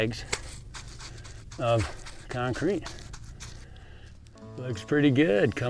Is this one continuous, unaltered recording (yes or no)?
no